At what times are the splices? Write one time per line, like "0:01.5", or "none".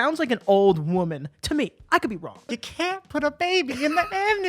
0:02.5